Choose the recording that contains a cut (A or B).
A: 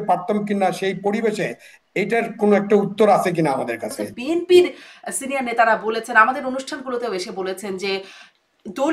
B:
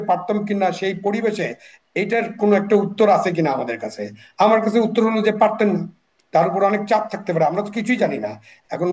A